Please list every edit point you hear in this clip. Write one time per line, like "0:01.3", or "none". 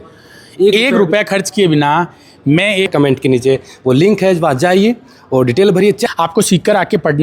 0:02.9
0:06.0